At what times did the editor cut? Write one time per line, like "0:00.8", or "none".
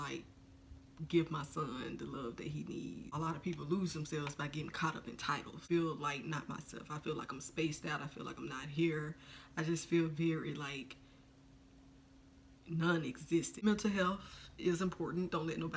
0:03.1
0:05.6
0:13.5